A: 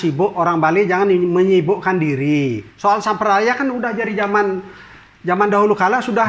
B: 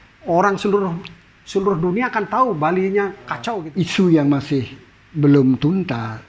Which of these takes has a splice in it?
B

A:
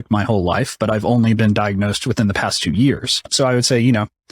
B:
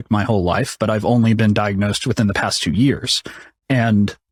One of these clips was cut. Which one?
A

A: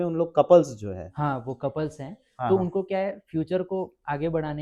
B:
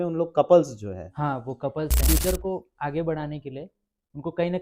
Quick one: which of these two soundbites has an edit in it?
B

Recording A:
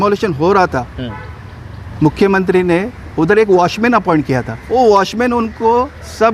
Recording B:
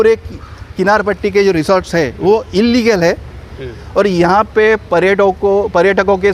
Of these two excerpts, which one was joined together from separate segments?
A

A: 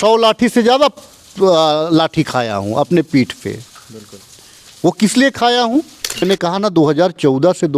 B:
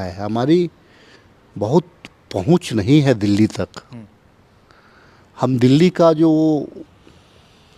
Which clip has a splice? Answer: A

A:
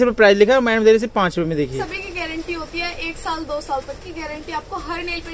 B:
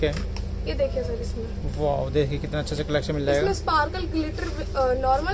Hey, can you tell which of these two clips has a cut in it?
A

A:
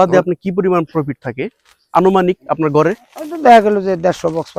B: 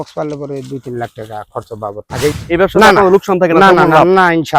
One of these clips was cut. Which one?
B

